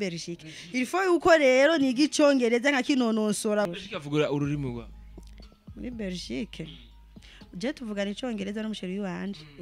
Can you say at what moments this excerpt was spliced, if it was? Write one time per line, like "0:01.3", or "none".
0:03.7

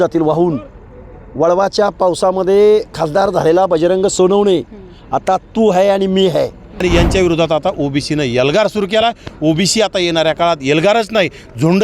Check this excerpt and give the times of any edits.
0:06.7

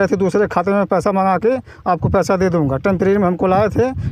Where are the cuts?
none

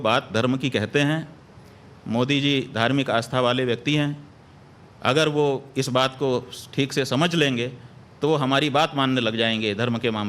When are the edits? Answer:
0:09.3

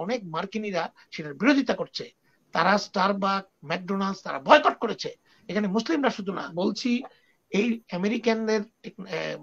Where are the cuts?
0:06.5

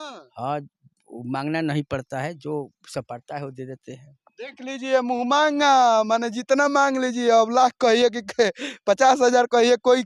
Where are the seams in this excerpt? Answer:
none

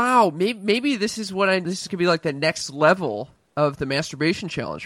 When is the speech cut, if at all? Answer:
0:01.7

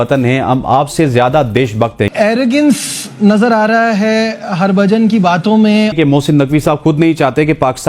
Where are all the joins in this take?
0:02.1
0:05.9

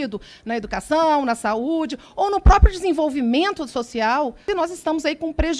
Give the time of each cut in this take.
0:04.4

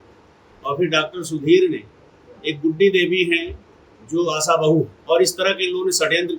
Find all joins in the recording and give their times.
0:05.0

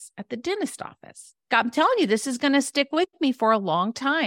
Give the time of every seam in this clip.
0:01.5

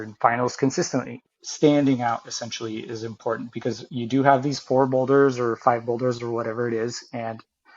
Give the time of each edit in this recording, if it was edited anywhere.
0:01.2

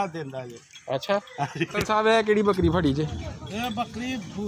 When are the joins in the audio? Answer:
0:01.7

